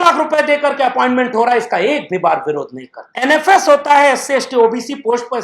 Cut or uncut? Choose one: cut